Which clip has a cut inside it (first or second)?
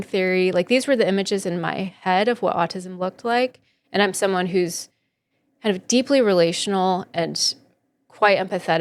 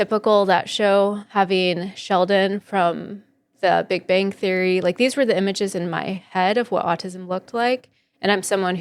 second